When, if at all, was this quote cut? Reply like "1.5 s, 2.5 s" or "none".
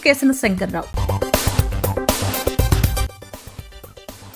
none